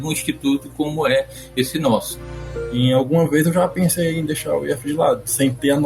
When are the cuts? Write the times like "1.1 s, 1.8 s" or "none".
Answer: 2.2 s